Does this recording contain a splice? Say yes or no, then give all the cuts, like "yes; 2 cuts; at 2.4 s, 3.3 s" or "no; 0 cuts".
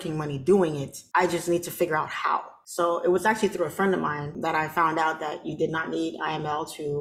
yes; 3 cuts; at 0.9 s, 2.6 s, 4.3 s